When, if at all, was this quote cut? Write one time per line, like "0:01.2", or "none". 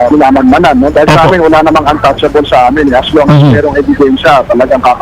none